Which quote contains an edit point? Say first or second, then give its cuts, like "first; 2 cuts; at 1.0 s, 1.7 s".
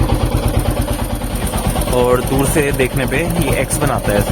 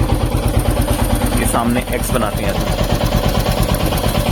first; 1 cut; at 1.3 s